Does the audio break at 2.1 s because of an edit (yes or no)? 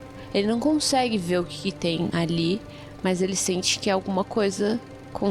yes